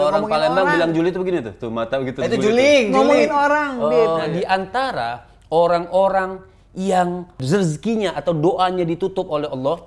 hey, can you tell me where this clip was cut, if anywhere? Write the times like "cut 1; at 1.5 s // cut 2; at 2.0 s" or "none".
cut 1; at 4.3 s // cut 2; at 7.4 s